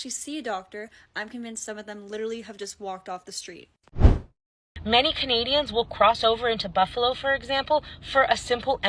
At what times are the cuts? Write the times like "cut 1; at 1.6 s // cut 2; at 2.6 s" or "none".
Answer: cut 1; at 4.3 s